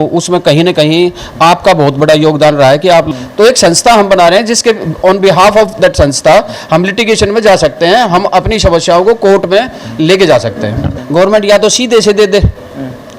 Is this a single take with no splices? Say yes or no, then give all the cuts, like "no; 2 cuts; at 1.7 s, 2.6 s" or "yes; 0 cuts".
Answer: no; 2 cuts; at 3.1 s, 10.9 s